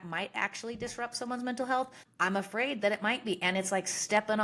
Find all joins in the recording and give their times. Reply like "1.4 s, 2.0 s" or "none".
2.0 s

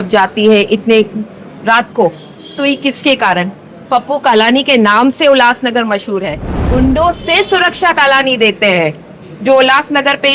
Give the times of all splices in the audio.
6.6 s

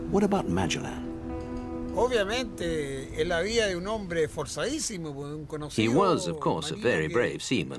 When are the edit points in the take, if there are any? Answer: 3.9 s

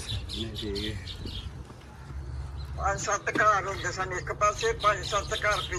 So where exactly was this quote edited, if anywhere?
none

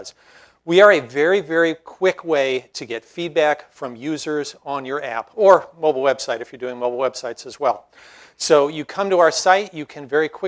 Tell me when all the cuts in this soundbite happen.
none

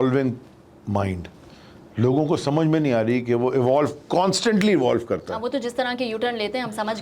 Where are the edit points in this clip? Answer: none

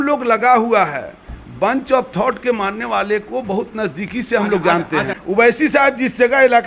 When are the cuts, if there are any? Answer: 5.2 s

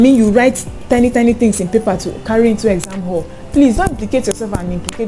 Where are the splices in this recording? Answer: none

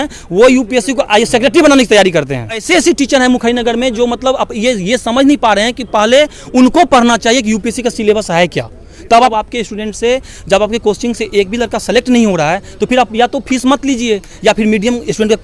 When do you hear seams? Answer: 2.6 s, 9.3 s

